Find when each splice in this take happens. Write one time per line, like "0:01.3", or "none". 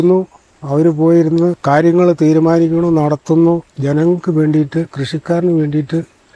0:01.6